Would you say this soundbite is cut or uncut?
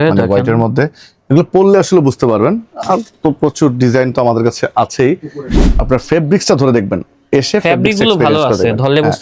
cut